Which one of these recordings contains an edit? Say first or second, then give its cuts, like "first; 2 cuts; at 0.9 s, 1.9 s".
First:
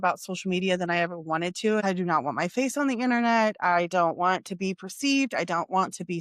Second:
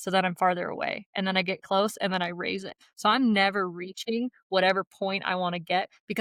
first; 1 cut; at 1.8 s